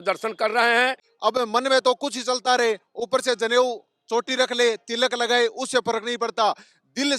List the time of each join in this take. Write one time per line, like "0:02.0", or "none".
0:01.1

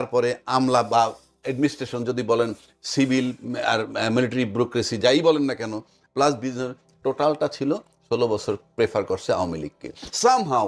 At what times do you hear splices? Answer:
none

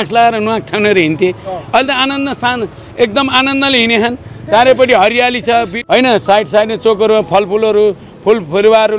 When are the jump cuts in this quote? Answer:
0:05.8

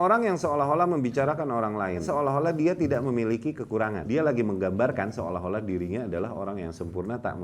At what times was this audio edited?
0:02.0
0:04.0

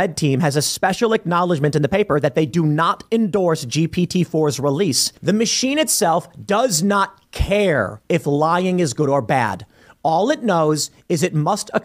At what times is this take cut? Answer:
0:05.1

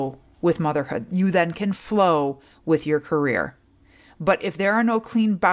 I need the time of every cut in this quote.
none

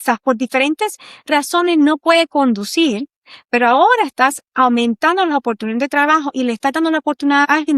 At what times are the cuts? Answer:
none

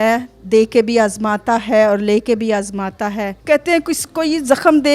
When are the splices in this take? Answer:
0:03.4

